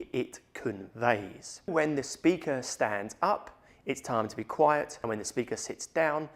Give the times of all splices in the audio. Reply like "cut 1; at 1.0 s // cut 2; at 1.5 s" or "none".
cut 1; at 1.7 s // cut 2; at 5.0 s